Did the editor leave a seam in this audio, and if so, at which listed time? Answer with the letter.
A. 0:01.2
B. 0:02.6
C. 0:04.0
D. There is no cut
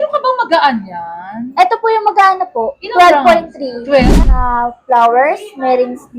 C